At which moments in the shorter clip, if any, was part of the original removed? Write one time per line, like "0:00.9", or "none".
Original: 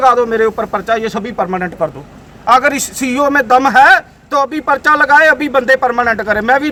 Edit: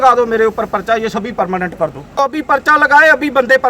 0:02.4